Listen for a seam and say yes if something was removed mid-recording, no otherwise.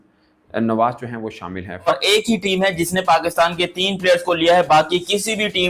yes